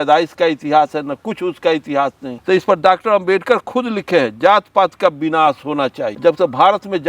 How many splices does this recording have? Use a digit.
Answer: 2